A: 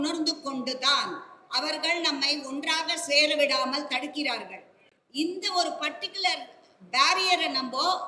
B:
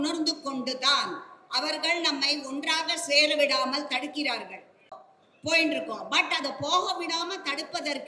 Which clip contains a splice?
B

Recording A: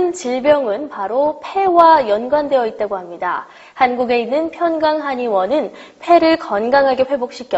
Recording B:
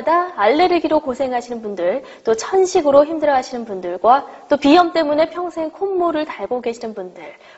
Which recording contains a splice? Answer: B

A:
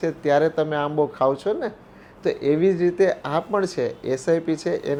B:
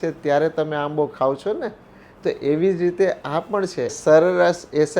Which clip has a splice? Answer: B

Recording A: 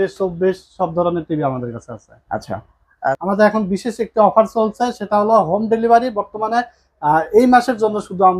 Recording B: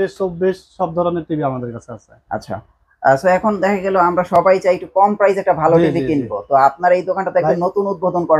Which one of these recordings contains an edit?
A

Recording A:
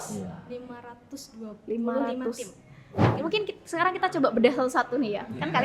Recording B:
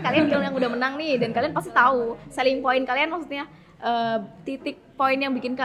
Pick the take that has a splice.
A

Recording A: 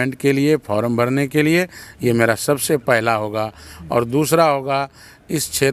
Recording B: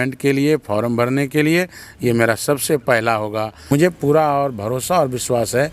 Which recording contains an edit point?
B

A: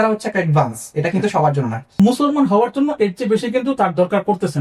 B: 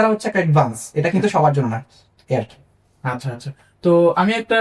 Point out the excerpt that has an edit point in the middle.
A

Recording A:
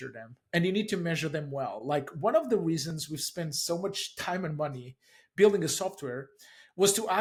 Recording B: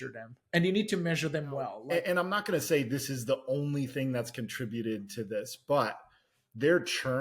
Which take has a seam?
B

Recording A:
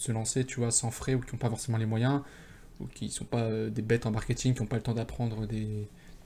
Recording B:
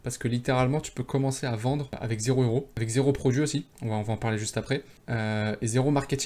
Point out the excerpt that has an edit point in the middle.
B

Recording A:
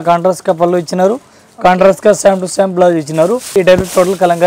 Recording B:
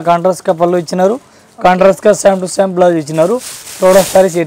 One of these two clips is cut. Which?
A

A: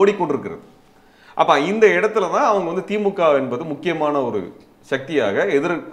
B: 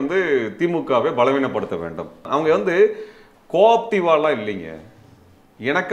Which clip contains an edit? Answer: B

